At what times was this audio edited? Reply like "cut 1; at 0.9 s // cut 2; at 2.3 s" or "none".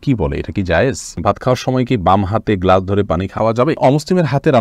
cut 1; at 1.2 s // cut 2; at 3.6 s